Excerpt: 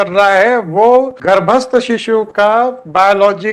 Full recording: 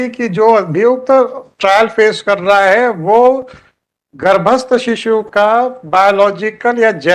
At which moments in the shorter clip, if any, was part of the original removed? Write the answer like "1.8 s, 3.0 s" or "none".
1.2 s